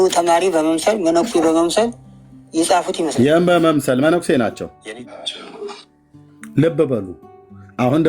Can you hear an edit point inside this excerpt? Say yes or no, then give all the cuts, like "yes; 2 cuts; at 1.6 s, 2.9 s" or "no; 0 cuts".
yes; 1 cut; at 4.9 s